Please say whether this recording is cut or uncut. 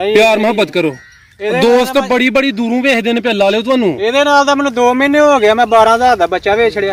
uncut